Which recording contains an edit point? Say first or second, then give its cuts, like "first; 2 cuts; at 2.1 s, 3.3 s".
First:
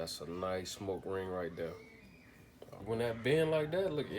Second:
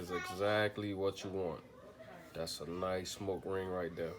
first; 1 cut; at 2.8 s